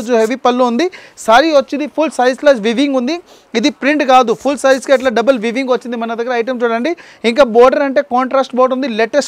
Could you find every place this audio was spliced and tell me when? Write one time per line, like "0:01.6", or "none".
none